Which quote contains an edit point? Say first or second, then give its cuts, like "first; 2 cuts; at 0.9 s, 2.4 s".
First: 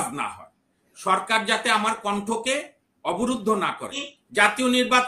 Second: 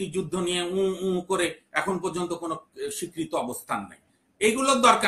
first; 1 cut; at 4.1 s